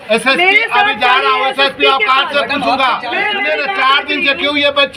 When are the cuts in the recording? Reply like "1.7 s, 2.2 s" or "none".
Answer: 3.3 s